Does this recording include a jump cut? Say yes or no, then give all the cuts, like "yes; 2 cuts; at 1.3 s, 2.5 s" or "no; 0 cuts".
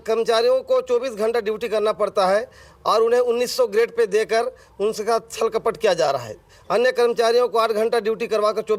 no; 0 cuts